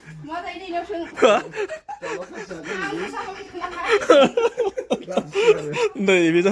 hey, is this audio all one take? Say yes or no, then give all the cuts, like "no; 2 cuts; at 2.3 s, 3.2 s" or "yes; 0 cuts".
yes; 0 cuts